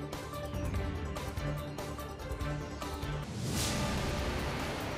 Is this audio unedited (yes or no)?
no